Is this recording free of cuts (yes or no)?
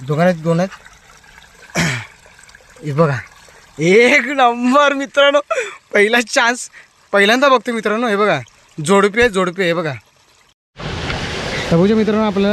no